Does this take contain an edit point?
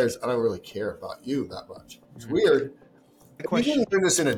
yes; 1 cut; at 3.4 s

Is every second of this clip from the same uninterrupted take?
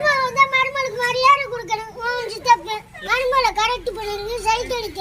yes; 0 cuts

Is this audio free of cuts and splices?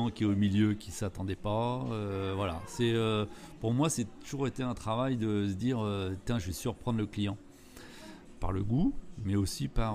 yes; 0 cuts

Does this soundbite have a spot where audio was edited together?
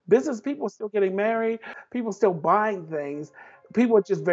yes; 1 cut; at 1.7 s

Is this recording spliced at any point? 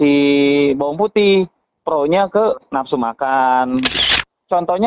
yes; 1 cut; at 4.0 s

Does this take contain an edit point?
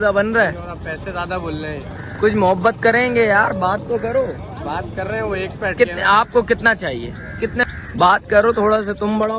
yes; 1 cut; at 7.6 s

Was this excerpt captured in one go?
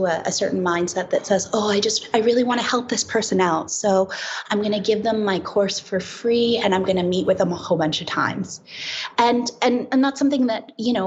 yes; 0 cuts

